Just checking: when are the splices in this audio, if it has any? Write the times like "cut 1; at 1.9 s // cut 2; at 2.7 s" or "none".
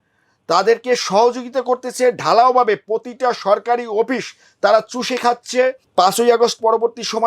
cut 1; at 5.8 s